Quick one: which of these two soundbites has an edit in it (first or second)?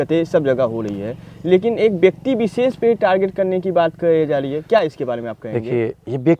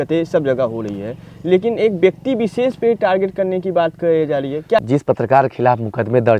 second